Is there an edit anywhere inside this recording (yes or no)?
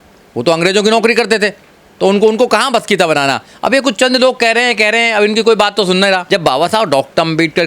yes